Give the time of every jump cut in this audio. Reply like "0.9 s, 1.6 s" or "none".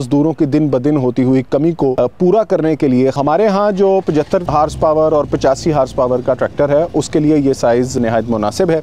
1.9 s, 3.2 s, 4.5 s, 7.9 s

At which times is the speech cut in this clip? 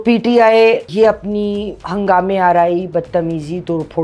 none

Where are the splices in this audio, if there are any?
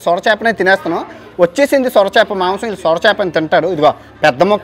none

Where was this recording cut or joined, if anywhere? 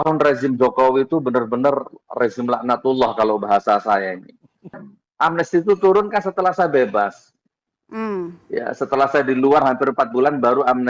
4.8 s

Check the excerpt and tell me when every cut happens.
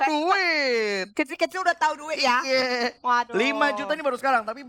none

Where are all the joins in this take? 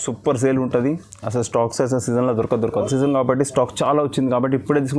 2.9 s

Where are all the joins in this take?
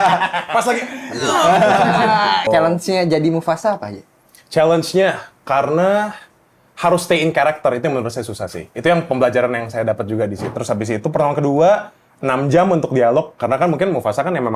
2.5 s, 10.5 s

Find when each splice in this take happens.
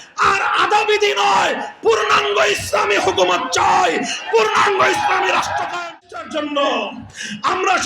5.9 s

